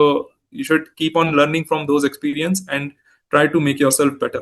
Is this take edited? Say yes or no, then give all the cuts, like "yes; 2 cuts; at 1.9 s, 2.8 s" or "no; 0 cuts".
no; 0 cuts